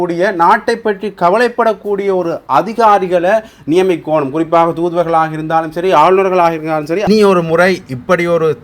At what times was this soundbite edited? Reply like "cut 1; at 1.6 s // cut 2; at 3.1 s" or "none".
cut 1; at 7.1 s